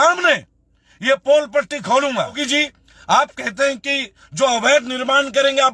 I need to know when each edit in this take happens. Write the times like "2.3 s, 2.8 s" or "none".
2.4 s